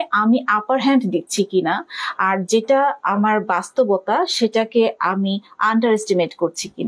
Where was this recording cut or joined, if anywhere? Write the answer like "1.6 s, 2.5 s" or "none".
none